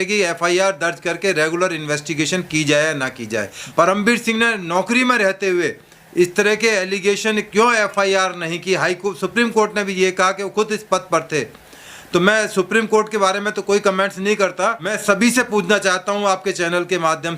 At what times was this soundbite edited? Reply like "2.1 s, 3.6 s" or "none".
3.5 s, 15.0 s